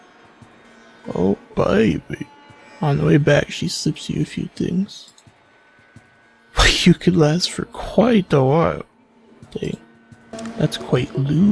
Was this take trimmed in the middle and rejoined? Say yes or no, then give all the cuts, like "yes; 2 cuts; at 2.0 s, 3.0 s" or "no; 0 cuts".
yes; 1 cut; at 10.4 s